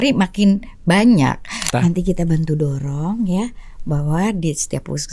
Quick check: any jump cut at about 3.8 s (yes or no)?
no